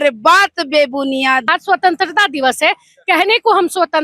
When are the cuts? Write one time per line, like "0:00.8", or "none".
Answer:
0:01.4